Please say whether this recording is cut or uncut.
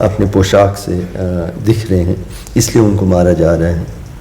uncut